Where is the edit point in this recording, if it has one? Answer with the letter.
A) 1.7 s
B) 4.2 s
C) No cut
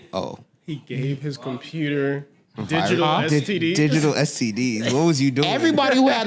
C